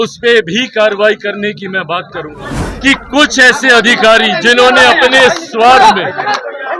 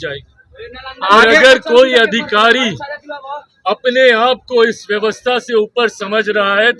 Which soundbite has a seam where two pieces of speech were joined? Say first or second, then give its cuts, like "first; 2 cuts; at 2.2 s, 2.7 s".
first; 1 cut; at 2.7 s